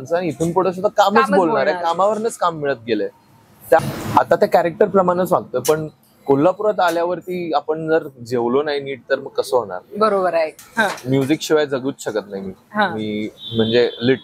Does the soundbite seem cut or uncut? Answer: cut